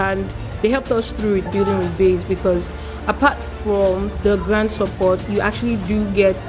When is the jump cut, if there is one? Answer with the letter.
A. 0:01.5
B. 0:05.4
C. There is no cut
A